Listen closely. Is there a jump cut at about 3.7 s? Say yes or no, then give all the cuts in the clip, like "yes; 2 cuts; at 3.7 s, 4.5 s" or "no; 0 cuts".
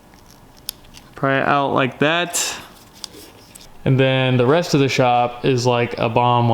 yes; 1 cut; at 3.7 s